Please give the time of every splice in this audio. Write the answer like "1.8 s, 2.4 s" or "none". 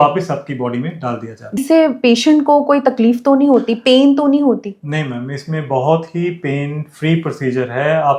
1.6 s

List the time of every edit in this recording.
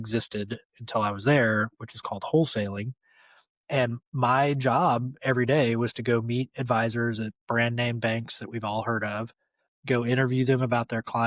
2.9 s

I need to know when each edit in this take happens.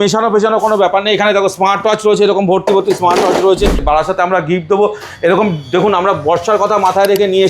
3.8 s

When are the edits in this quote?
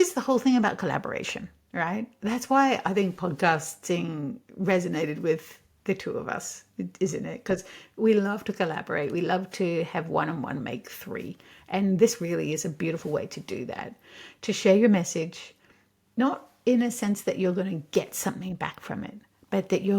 none

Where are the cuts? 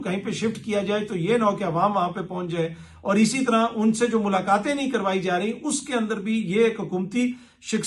none

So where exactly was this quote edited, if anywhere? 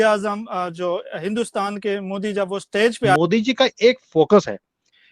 3.2 s

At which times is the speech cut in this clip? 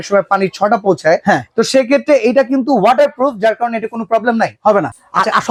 none

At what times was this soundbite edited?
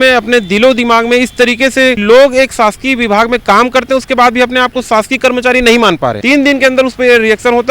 2.0 s, 6.2 s

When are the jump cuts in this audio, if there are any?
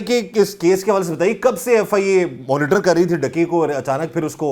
none

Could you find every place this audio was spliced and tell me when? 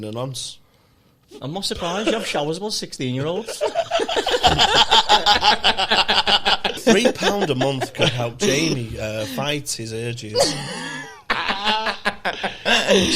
6.8 s, 11.2 s

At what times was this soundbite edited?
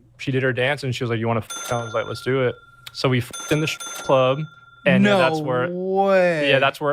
1.5 s, 3.3 s

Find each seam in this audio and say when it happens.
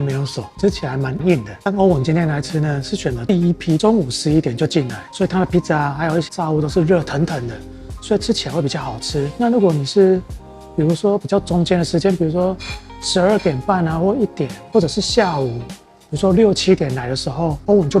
1.5 s, 3.8 s, 6.3 s

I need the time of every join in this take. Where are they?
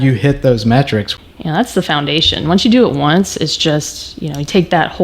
1.1 s

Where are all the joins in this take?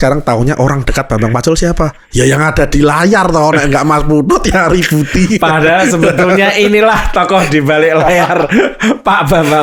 none

